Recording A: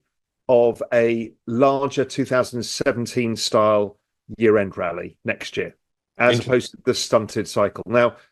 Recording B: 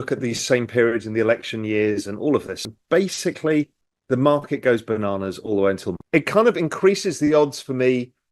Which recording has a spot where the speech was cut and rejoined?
B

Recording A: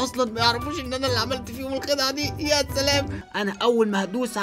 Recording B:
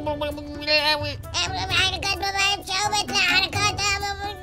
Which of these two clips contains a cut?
A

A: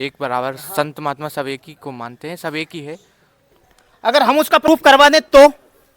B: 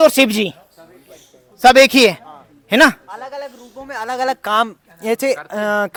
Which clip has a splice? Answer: A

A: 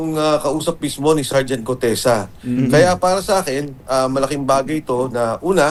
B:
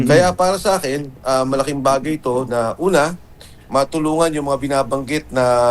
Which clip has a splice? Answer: B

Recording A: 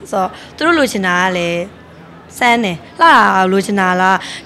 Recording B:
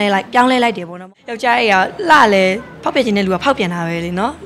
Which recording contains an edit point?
B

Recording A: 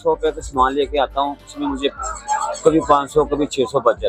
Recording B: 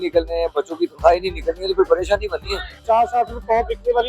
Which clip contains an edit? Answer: B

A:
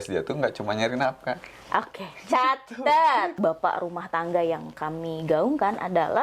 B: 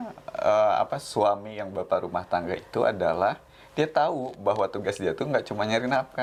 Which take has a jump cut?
A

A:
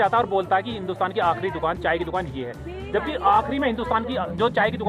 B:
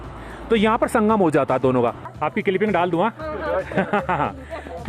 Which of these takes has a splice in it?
B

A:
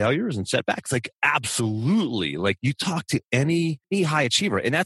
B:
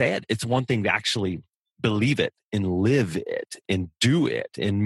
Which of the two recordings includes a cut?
A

